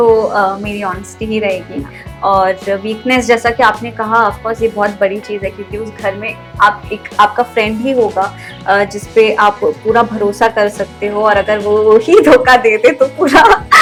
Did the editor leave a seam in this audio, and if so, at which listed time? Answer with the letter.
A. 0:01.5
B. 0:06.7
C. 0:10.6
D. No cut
D